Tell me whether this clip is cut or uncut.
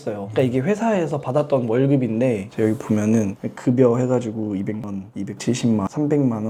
uncut